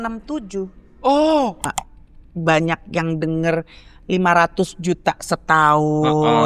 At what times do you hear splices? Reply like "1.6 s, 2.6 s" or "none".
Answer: 1.8 s